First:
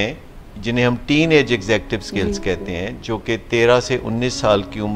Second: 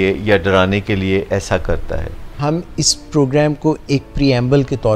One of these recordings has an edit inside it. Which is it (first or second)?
second